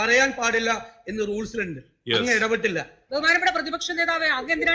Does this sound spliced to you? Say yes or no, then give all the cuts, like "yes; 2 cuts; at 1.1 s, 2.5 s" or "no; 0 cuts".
yes; 1 cut; at 3.1 s